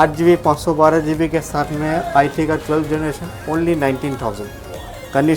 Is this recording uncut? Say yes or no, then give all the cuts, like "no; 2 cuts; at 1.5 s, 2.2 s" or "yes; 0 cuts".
yes; 0 cuts